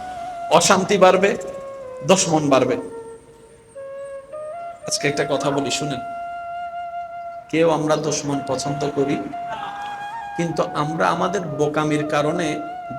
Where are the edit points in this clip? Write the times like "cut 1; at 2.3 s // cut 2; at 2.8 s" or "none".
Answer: cut 1; at 5.9 s // cut 2; at 7.5 s